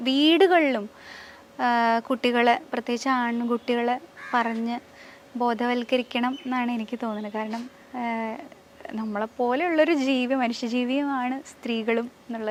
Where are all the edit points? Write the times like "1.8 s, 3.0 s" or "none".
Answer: none